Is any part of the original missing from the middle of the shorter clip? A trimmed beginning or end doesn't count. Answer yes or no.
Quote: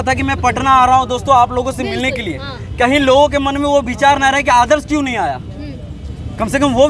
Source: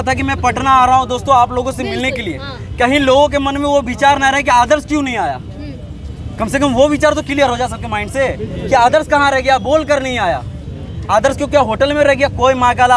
no